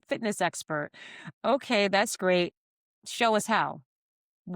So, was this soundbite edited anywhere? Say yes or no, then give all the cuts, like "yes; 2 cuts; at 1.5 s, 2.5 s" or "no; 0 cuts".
no; 0 cuts